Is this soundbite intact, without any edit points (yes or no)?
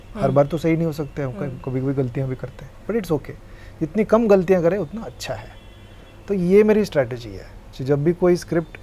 yes